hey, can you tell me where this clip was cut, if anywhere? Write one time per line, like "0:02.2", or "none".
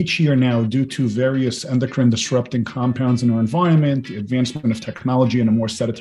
none